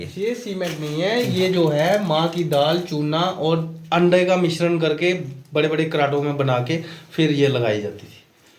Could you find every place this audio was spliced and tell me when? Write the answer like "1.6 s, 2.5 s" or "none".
none